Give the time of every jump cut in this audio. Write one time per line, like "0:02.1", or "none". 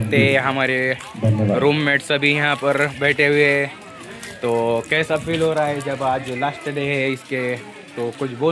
none